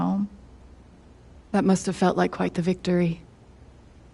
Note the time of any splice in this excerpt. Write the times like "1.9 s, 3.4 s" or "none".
3.2 s